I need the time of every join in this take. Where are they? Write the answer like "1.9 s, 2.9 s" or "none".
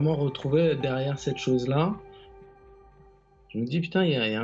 none

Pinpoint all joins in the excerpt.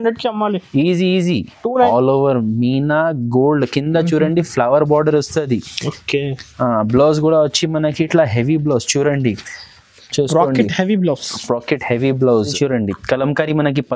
1.6 s, 12.5 s

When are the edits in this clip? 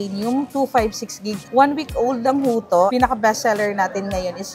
2.9 s

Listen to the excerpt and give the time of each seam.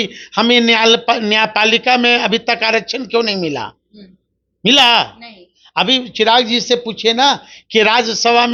none

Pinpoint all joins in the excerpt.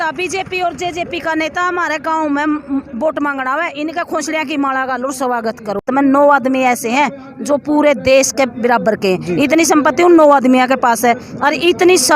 5.8 s

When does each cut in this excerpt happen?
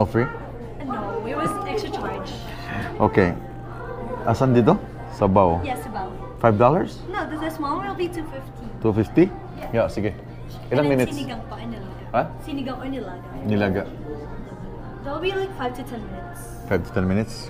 none

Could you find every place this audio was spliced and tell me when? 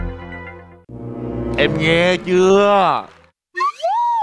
none

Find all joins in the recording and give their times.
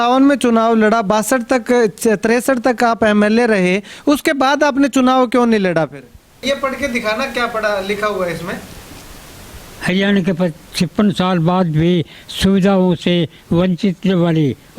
6.4 s

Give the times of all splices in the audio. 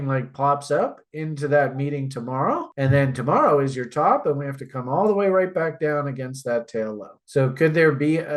none

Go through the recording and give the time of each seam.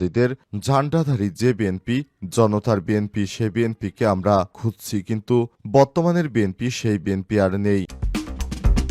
8.0 s

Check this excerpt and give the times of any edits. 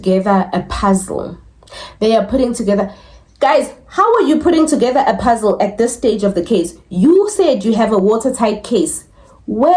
none

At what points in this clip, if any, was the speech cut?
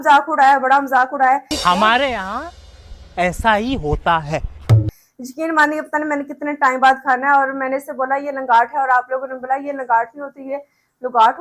none

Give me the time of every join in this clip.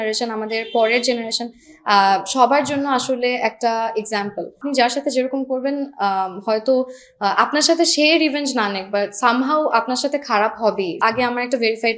4.6 s, 11.0 s

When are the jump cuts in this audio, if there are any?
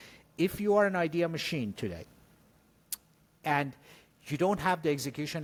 none

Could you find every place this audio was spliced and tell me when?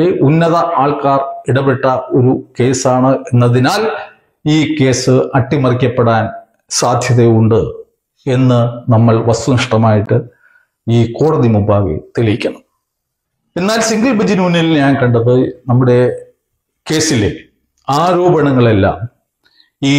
none

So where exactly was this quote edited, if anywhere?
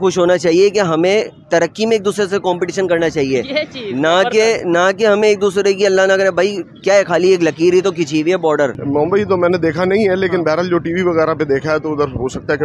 8.8 s

